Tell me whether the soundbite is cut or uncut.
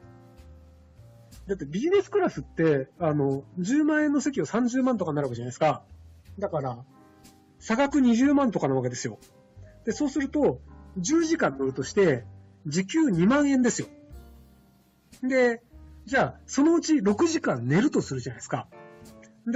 cut